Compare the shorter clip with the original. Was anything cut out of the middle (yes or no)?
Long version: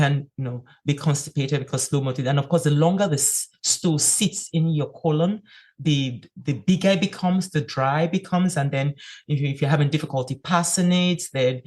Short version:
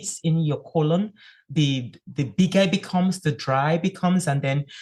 no